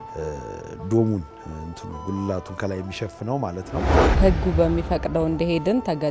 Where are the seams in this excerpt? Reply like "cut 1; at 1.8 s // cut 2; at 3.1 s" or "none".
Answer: cut 1; at 4.1 s

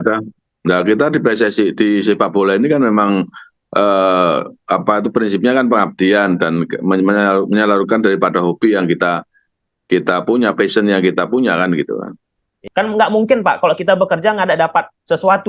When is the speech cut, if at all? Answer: none

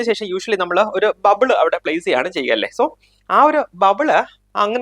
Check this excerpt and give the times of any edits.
none

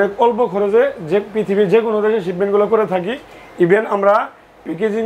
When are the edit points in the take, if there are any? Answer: none

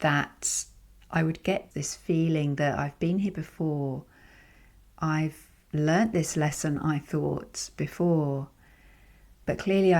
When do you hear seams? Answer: cut 1; at 1.7 s

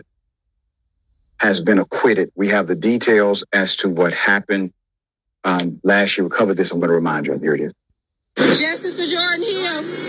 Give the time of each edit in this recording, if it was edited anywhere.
cut 1; at 2.4 s

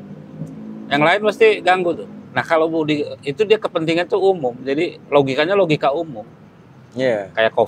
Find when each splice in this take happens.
cut 1; at 2.1 s

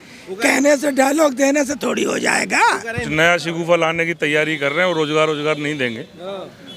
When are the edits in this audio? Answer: cut 1; at 3.0 s

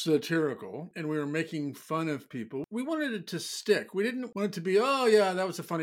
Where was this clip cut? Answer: cut 1; at 0.9 s // cut 2; at 2.6 s // cut 3; at 4.3 s

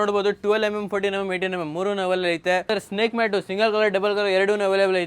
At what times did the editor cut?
cut 1; at 2.6 s

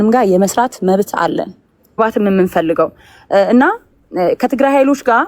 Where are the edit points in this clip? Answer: cut 1; at 2.0 s

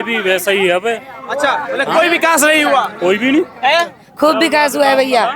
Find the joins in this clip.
none

